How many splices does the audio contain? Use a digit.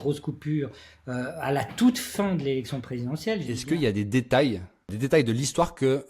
2